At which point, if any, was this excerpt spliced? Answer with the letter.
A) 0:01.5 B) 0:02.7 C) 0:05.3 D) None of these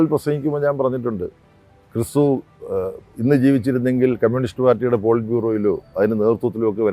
D